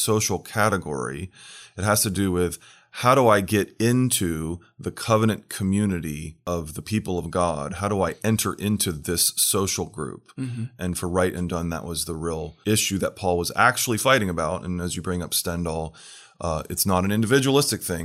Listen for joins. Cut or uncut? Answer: cut